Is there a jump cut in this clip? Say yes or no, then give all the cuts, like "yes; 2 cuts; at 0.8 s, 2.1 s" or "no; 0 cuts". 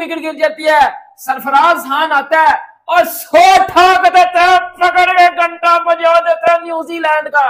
no; 0 cuts